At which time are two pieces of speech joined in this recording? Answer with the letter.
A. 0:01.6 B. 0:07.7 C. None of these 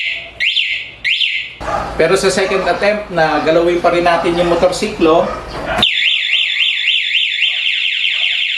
A